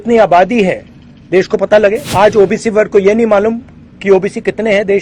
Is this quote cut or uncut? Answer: cut